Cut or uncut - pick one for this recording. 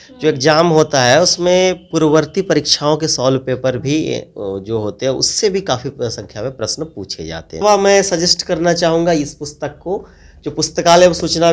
cut